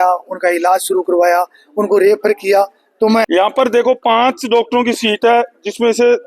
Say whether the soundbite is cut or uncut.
cut